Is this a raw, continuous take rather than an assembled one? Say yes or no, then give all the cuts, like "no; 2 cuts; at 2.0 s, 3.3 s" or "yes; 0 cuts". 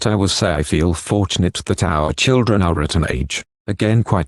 yes; 0 cuts